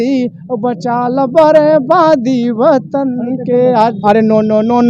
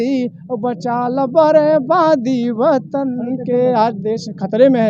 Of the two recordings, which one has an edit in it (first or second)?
first